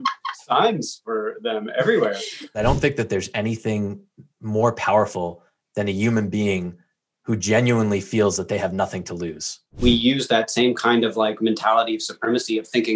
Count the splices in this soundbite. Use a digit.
2